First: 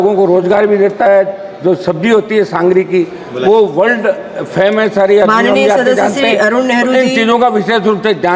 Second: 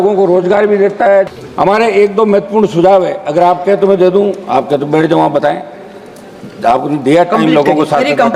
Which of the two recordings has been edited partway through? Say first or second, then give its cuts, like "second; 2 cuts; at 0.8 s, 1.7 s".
second; 1 cut; at 1.4 s